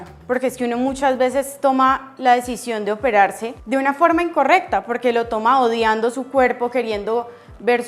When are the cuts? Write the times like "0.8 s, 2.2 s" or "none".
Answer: 3.5 s